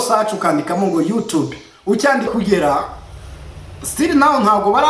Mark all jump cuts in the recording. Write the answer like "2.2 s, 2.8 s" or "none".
2.3 s